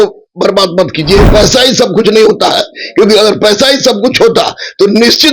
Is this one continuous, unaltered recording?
no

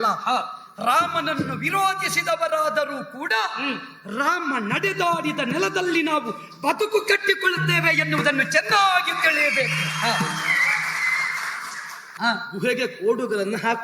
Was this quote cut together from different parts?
yes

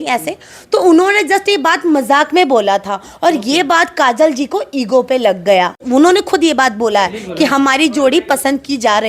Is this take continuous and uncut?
no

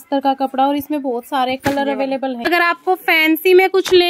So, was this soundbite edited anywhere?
yes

